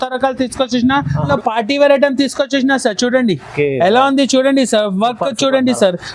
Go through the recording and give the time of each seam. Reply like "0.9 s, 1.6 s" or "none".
1.3 s